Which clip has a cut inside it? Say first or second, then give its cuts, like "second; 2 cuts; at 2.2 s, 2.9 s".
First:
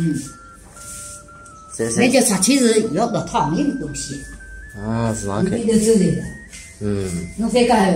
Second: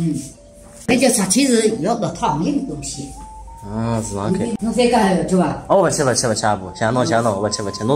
second; 2 cuts; at 0.9 s, 4.5 s